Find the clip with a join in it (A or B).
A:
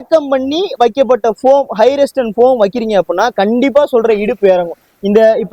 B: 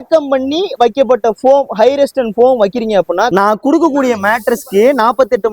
B